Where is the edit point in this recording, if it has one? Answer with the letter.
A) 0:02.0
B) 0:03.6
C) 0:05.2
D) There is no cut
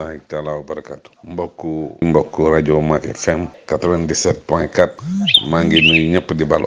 A